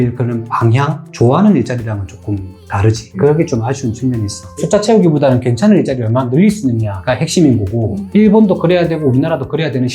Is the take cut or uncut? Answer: cut